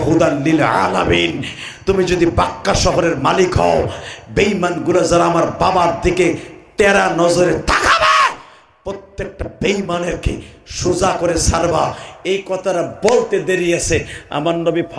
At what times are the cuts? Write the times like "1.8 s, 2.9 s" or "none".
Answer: none